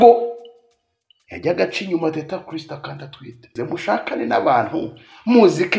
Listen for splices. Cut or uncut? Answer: cut